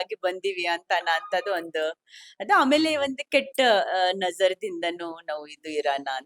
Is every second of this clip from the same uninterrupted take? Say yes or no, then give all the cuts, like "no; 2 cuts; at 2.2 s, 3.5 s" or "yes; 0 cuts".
yes; 0 cuts